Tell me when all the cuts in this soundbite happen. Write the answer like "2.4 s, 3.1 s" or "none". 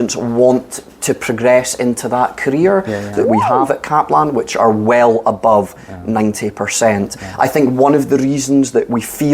3.1 s